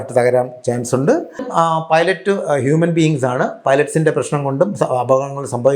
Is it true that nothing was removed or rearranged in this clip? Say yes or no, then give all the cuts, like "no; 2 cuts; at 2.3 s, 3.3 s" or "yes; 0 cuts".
no; 1 cut; at 1.5 s